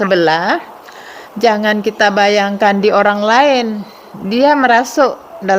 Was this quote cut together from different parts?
no; 0 cuts

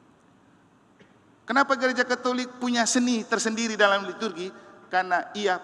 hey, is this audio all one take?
yes; 0 cuts

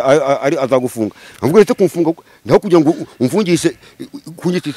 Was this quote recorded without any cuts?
yes; 0 cuts

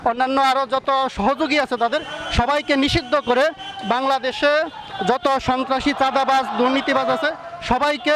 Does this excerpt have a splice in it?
no; 0 cuts

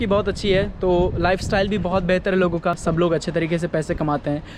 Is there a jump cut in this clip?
no; 0 cuts

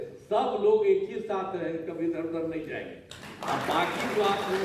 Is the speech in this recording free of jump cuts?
yes; 0 cuts

